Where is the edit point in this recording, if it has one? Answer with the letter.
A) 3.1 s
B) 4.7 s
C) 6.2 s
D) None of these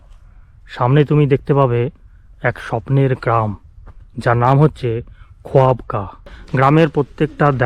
C